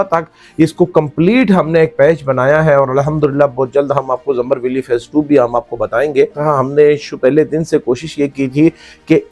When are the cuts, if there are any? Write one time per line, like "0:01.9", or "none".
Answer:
none